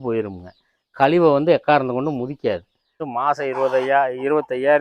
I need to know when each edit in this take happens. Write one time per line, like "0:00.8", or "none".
0:03.0